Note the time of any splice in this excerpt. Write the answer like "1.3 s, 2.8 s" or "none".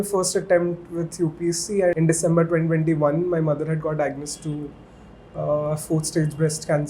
1.9 s